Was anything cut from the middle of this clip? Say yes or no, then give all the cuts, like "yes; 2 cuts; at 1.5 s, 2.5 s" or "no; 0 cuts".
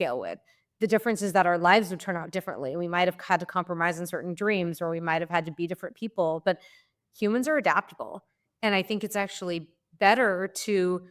no; 0 cuts